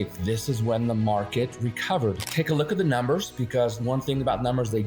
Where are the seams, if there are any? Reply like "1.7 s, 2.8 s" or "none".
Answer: 2.2 s